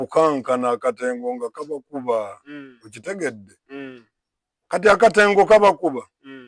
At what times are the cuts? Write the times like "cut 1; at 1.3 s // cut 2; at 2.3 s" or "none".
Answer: none

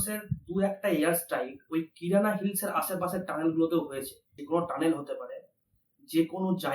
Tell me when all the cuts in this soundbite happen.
cut 1; at 4.4 s

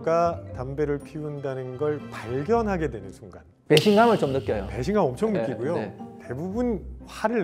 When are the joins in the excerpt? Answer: none

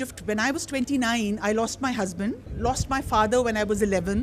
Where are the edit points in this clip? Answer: cut 1; at 2.5 s

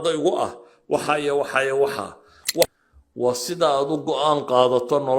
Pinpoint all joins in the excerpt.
cut 1; at 2.7 s

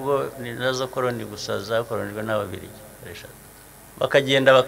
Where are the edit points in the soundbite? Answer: cut 1; at 3.6 s

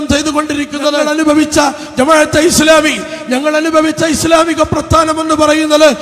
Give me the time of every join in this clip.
cut 1; at 1.0 s

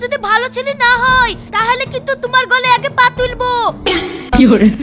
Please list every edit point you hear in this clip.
none

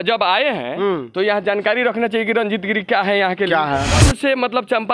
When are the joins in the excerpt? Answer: cut 1; at 3.9 s

